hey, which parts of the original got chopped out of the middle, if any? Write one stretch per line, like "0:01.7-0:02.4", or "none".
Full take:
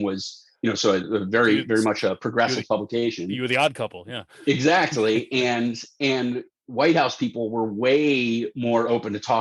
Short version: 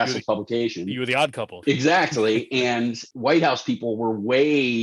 0:03.9-0:04.3
0:05.9-0:06.6